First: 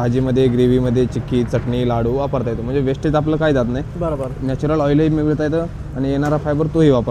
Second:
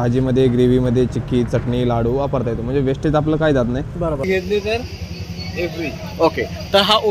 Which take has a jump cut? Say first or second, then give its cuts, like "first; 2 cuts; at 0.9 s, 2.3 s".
second; 1 cut; at 4.2 s